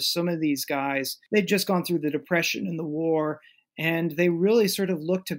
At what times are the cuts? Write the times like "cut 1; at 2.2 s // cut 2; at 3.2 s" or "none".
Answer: cut 1; at 1.2 s